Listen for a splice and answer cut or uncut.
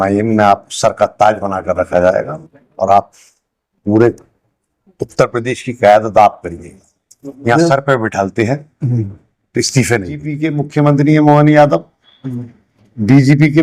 cut